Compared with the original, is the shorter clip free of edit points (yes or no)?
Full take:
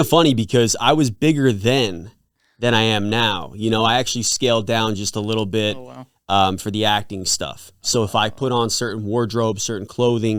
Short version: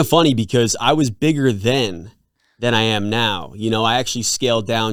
yes